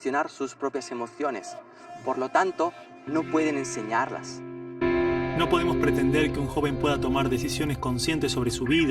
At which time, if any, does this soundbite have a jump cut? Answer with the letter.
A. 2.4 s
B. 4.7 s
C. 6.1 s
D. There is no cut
B